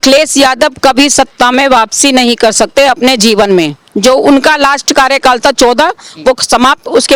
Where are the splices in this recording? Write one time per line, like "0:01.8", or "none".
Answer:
none